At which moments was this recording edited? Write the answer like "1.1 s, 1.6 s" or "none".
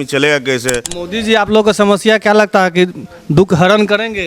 0.9 s